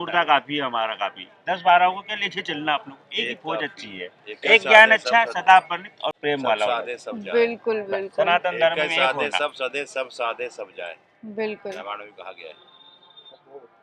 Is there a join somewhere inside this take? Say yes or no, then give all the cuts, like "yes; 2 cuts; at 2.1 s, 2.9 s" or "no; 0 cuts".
no; 0 cuts